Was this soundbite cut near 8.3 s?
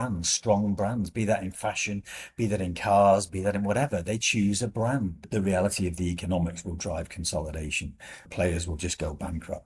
yes; 2 cuts; at 5.3 s, 8.3 s

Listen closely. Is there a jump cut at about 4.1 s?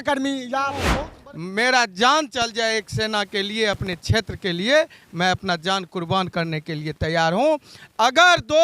no; 1 cut; at 0.9 s

